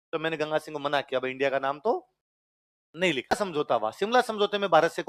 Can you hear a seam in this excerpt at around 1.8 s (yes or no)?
no